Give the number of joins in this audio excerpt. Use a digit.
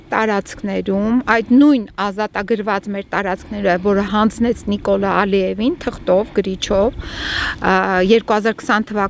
0